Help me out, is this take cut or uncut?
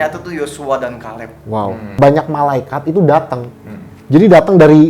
cut